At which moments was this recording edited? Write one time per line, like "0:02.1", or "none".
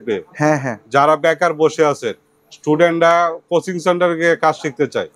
none